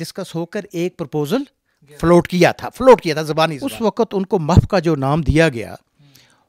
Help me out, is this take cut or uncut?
cut